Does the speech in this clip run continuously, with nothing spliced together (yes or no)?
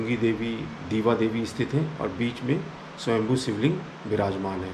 yes